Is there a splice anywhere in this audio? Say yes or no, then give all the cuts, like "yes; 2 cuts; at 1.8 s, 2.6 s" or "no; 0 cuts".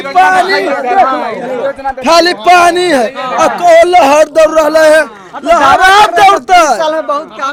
no; 0 cuts